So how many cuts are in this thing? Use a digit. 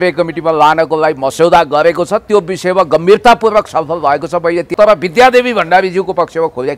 1